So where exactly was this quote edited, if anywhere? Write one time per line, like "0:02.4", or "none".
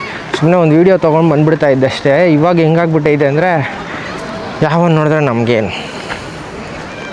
none